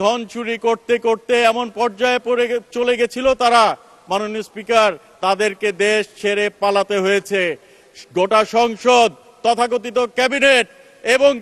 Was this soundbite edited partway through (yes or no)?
no